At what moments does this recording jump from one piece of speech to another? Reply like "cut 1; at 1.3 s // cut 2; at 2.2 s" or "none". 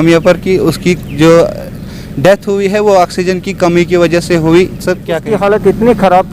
cut 1; at 5.2 s

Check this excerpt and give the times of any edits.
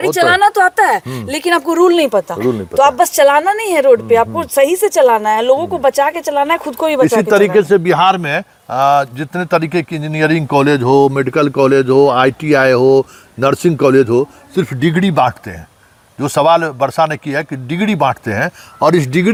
none

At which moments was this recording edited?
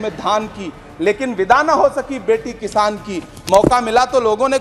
none

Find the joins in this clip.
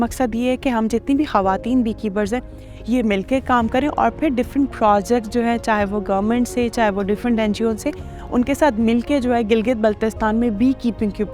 none

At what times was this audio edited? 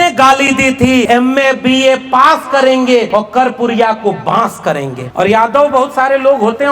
cut 1; at 1.1 s // cut 2; at 3.1 s // cut 3; at 5.0 s

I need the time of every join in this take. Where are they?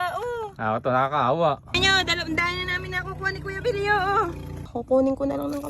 cut 1; at 1.8 s // cut 2; at 4.6 s

